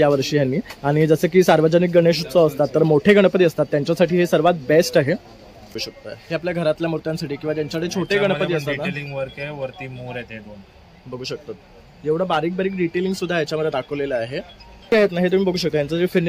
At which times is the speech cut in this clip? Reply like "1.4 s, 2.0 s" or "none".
5.9 s, 14.9 s

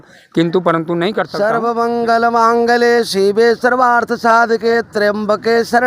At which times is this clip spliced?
1.2 s

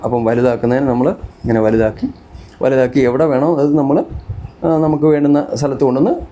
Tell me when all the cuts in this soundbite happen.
none

